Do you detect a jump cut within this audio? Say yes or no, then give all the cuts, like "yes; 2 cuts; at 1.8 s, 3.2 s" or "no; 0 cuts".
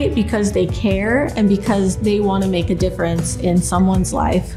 no; 0 cuts